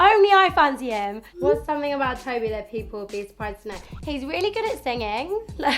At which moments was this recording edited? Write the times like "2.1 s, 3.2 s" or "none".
1.2 s

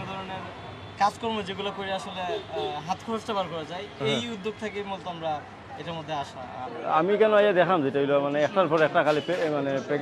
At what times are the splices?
6.7 s

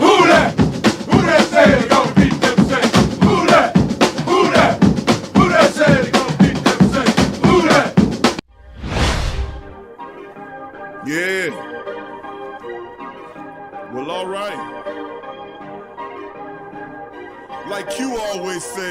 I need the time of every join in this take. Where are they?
8.4 s, 9.5 s

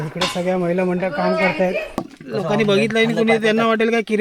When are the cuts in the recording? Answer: 2.0 s

